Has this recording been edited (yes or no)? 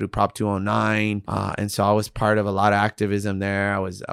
yes